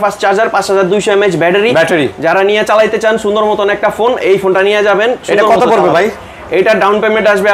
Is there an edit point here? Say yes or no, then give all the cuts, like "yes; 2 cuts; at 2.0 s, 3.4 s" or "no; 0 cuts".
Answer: no; 0 cuts